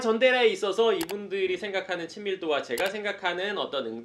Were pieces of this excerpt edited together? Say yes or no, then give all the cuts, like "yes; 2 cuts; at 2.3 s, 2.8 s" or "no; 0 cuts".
no; 0 cuts